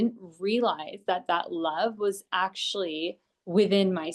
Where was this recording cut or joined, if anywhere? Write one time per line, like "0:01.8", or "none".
none